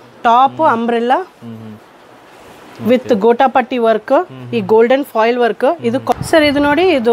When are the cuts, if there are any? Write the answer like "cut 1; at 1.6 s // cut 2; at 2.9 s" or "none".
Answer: cut 1; at 6.1 s